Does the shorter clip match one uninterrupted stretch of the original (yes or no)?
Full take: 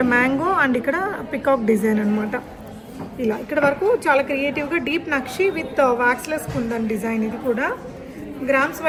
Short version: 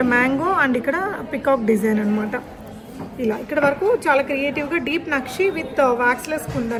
yes